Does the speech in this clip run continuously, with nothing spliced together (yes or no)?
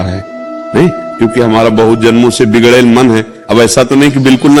yes